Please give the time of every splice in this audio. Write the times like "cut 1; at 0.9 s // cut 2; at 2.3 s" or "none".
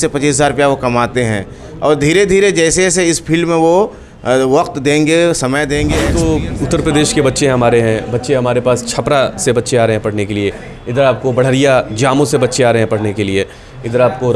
cut 1; at 6.0 s

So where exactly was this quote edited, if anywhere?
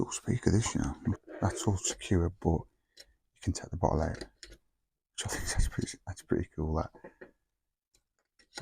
cut 1; at 1.2 s

